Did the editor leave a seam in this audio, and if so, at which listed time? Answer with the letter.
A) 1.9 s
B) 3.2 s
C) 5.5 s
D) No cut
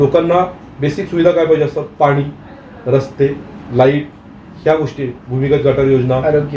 D